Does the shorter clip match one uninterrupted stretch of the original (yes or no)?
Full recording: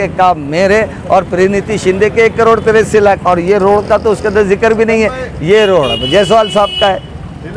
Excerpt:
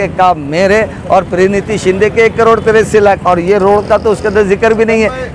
yes